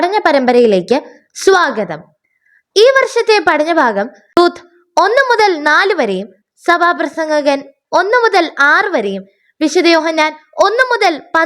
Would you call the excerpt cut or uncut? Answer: cut